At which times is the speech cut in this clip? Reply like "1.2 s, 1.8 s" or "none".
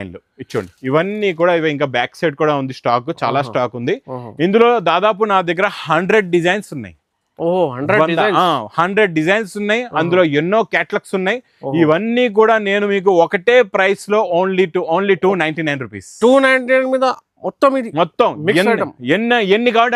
none